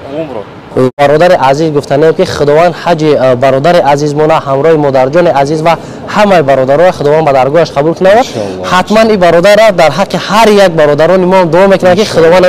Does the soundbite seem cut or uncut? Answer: cut